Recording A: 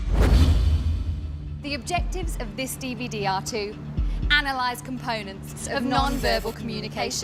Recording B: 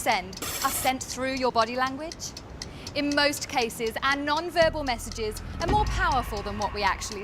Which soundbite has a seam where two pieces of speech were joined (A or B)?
B